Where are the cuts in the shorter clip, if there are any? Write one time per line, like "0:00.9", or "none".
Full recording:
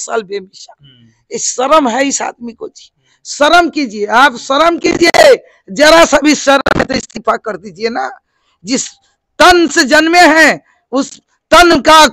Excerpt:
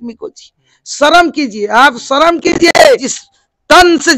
0:03.2